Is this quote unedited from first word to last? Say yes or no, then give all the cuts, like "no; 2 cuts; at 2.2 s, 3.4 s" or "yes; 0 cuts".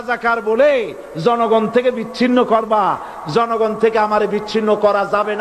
yes; 0 cuts